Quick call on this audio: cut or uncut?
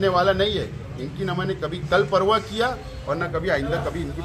uncut